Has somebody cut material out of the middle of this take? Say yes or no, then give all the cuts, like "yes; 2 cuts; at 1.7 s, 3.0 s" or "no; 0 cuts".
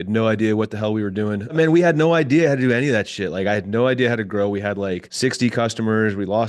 yes; 2 cuts; at 1.5 s, 5.1 s